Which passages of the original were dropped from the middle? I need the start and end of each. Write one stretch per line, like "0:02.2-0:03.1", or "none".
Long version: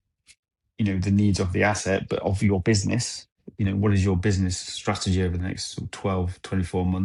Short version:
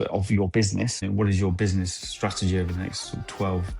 0:03.1-0:03.6